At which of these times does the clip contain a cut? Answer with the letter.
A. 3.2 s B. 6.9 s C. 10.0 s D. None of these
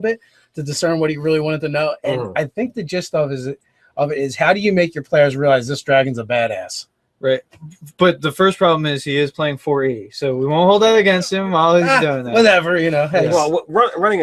D